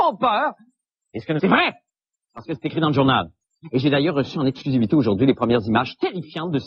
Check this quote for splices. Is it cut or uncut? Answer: uncut